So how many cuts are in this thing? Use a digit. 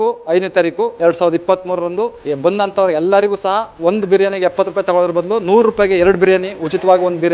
2